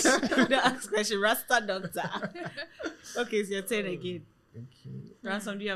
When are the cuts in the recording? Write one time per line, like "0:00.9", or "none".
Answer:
none